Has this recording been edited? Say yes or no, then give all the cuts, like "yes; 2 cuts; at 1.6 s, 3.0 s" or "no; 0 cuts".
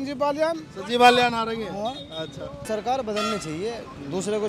yes; 1 cut; at 2.6 s